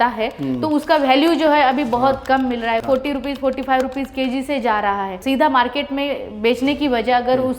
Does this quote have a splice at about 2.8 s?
yes; 2 cuts; at 2.8 s, 5.2 s

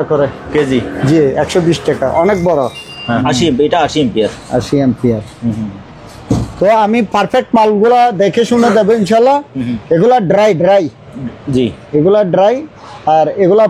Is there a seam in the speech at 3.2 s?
yes; 1 cut; at 3.2 s

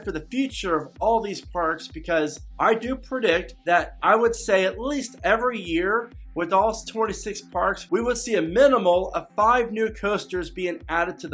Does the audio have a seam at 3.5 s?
yes; 2 cuts; at 2.4 s, 3.5 s

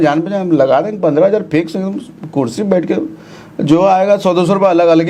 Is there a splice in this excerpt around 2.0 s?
no; 0 cuts

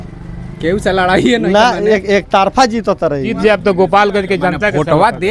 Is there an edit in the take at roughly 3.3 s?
yes; 1 cut; at 3.3 s

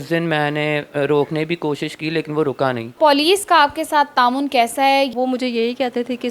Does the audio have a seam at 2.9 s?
yes; 2 cuts; at 2.9 s, 5.1 s

